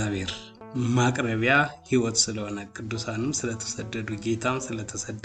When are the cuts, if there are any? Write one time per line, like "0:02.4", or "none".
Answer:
none